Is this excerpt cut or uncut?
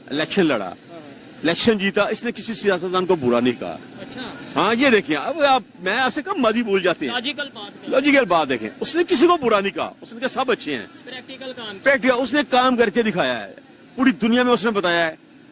uncut